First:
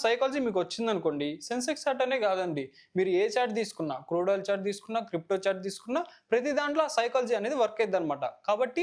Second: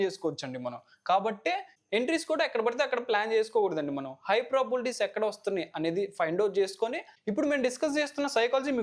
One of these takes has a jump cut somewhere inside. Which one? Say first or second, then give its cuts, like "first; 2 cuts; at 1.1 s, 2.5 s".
second; 2 cuts; at 1.8 s, 7.1 s